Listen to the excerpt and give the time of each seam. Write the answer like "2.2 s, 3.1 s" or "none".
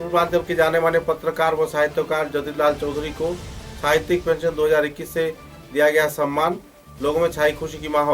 none